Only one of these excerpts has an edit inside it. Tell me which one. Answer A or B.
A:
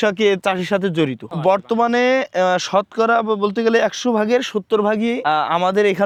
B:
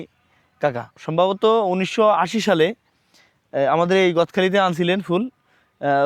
B